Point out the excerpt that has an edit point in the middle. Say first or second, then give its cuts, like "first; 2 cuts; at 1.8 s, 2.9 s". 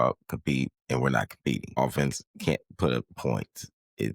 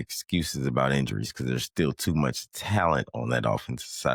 first; 1 cut; at 1.8 s